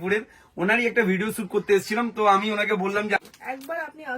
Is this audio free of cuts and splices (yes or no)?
no